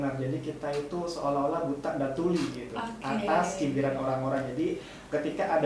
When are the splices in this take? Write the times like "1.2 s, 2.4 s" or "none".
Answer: none